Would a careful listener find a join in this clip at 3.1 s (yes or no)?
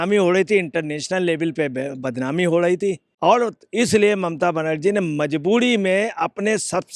yes